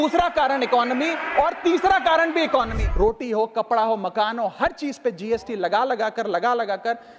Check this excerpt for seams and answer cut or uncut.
cut